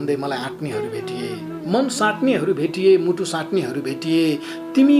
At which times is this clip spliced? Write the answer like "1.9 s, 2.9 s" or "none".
none